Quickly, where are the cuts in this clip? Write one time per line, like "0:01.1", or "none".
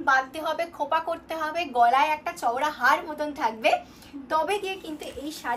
none